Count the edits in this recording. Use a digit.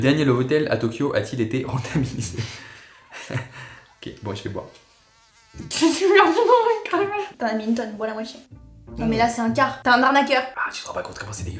0